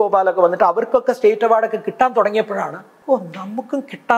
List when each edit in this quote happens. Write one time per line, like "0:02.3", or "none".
0:02.9